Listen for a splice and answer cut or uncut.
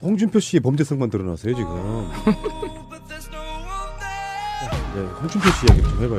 cut